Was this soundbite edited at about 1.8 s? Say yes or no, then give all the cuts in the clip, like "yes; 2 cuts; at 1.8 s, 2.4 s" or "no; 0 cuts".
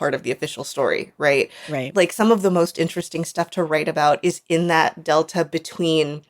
yes; 1 cut; at 1.8 s